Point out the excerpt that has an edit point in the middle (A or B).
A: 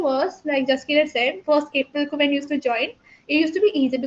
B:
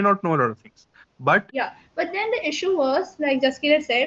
B